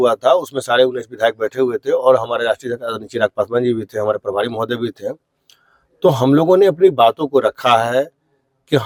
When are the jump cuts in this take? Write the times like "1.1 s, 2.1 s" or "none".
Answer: none